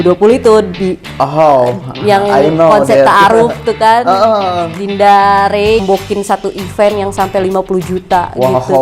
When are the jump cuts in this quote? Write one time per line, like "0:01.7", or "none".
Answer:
0:05.8